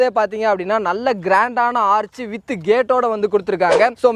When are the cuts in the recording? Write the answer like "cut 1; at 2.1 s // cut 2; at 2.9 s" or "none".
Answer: none